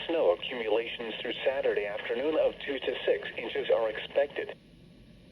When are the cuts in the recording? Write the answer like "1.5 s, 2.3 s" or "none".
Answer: 1.0 s